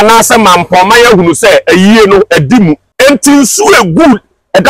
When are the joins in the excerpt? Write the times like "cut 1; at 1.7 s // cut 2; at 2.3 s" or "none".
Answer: cut 1; at 2.9 s